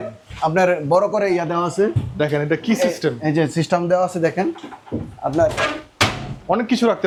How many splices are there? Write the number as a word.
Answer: zero